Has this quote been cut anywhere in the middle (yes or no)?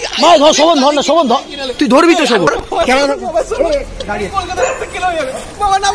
yes